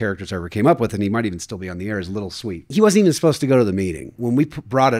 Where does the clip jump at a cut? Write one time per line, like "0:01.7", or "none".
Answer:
0:02.7
0:04.2